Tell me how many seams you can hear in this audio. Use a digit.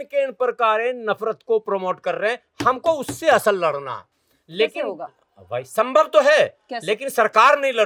0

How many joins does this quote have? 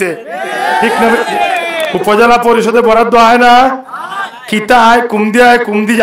1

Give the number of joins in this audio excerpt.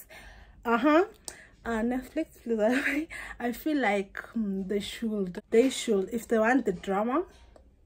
1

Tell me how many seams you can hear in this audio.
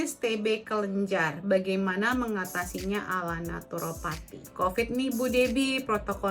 1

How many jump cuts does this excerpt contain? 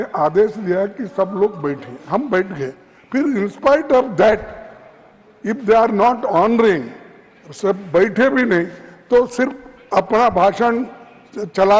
0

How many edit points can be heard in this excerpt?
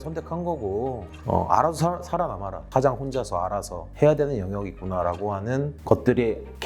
1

